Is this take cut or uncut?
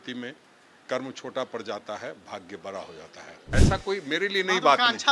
cut